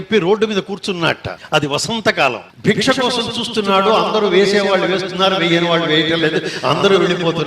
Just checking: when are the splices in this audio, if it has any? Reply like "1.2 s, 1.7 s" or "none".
1.3 s, 2.5 s

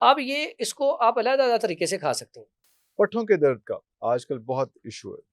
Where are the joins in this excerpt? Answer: 2.7 s

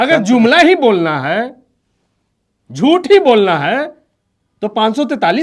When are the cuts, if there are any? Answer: none

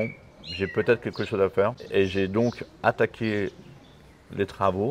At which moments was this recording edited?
1.8 s

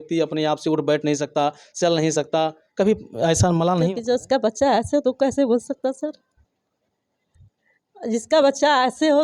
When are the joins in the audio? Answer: 4.0 s

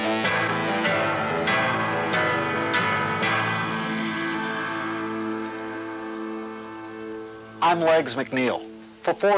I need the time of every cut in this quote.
1.9 s

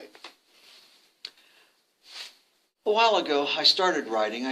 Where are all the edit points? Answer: 2.6 s

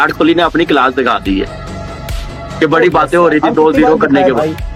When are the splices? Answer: none

